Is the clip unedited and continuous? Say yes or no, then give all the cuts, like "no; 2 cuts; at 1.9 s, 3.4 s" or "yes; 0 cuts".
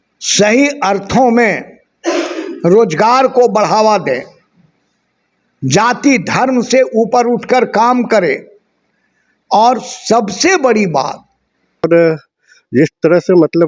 no; 1 cut; at 11.8 s